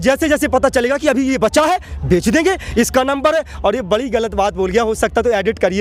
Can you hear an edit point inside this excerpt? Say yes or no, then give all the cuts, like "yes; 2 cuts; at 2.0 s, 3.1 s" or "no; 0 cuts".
no; 0 cuts